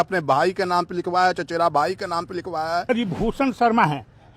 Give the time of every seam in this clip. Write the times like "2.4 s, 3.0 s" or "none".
2.8 s